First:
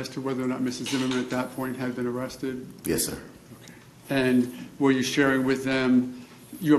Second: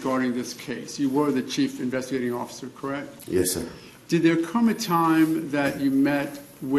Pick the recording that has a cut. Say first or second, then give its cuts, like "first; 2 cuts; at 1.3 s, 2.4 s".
first; 1 cut; at 1.6 s